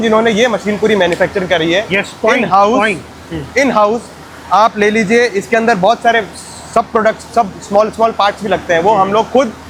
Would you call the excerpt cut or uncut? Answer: uncut